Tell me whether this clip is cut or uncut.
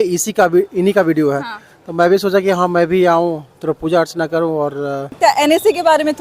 cut